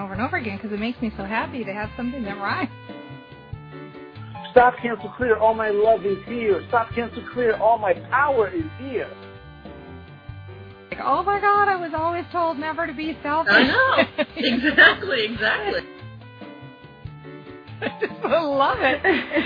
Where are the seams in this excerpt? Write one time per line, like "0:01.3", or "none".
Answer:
none